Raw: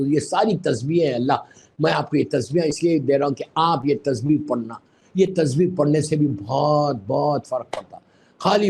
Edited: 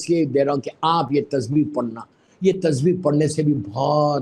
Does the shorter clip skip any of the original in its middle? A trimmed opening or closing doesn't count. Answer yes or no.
no